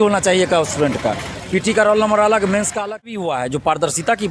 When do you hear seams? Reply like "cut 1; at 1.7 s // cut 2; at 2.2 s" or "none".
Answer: cut 1; at 3.1 s